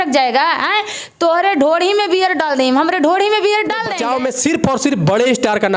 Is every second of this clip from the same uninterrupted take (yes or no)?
no